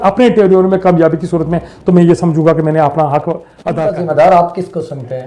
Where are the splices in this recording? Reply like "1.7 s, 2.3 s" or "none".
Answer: 3.5 s